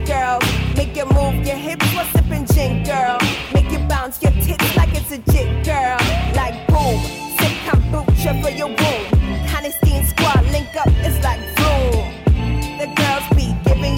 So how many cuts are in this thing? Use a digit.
0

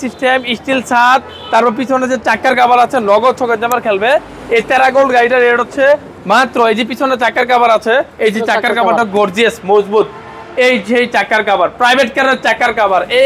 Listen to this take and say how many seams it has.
0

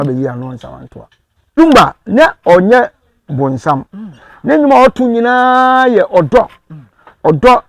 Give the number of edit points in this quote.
1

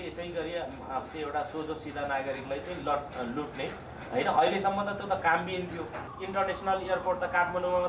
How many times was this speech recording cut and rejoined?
1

